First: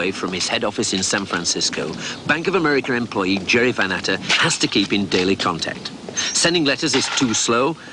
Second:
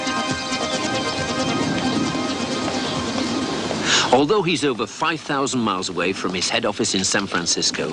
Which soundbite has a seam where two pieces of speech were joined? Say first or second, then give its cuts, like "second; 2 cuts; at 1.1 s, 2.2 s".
first; 1 cut; at 4.9 s